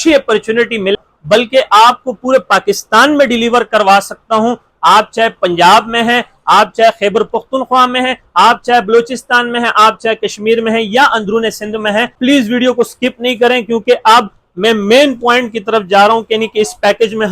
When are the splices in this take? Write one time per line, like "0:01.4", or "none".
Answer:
0:00.9
0:12.2

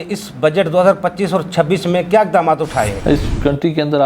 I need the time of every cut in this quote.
0:03.0

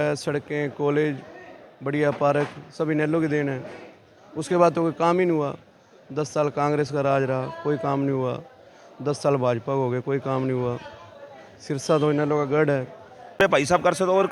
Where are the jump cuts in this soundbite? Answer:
0:13.4

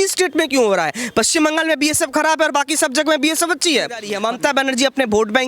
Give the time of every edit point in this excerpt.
0:04.1

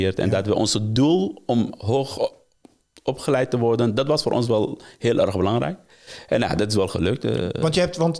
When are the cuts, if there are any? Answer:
none

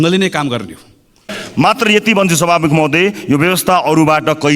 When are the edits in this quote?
0:01.2

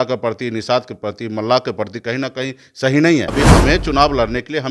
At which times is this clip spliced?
0:03.3

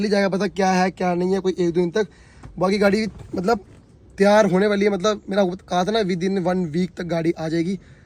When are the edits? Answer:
none

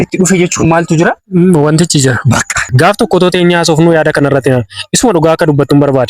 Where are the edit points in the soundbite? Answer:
0:02.7

